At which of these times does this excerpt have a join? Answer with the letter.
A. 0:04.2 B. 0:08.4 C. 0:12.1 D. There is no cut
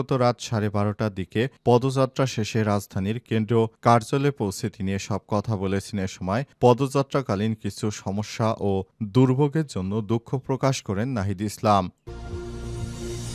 C